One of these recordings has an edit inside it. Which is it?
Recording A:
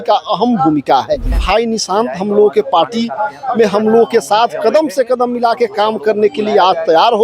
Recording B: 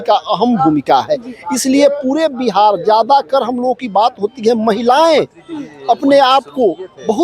A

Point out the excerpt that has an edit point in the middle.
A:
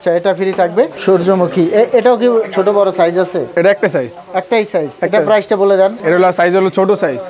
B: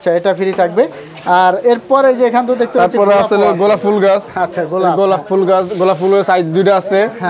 A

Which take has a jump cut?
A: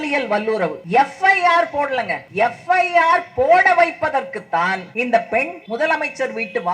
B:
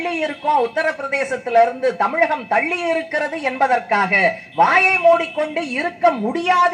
A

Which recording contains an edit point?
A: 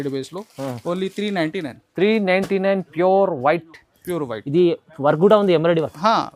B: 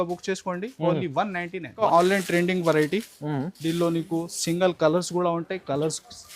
B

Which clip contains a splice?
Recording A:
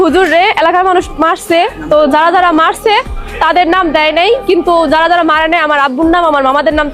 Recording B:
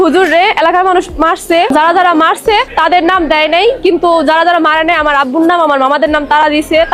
B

